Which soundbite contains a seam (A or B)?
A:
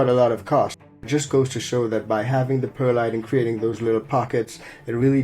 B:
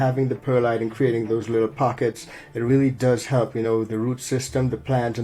A